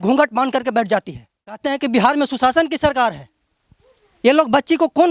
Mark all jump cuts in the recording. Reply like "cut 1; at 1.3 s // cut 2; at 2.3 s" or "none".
cut 1; at 1.6 s